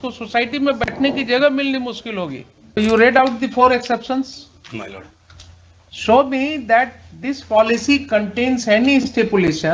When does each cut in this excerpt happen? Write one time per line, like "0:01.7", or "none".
0:02.8